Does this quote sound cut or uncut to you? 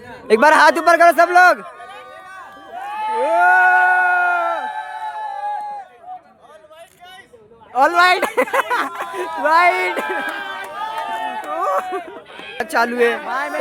cut